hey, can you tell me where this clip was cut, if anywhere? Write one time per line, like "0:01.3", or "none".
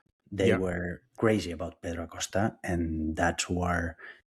none